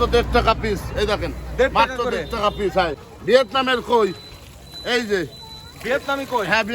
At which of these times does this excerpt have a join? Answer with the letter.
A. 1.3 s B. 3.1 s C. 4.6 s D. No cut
B